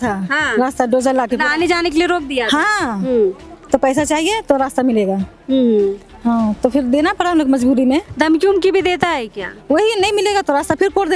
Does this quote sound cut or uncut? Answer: uncut